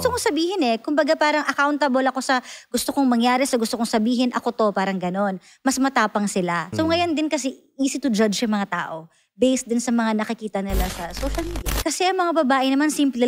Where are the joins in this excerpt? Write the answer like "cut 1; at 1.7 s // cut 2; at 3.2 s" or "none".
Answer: cut 1; at 6.7 s // cut 2; at 11.7 s